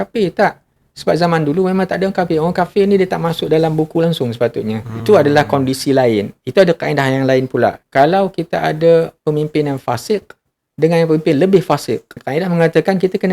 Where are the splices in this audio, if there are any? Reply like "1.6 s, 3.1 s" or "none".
4.9 s, 7.8 s, 12.2 s